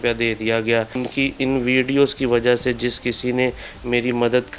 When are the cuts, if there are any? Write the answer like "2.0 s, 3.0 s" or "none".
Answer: 1.0 s